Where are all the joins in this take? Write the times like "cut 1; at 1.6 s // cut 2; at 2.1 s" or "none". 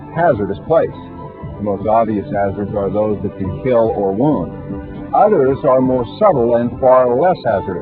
cut 1; at 1.8 s